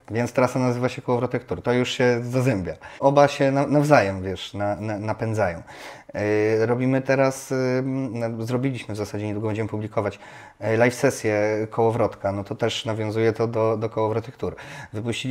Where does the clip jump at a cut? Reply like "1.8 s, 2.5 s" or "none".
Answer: 3.0 s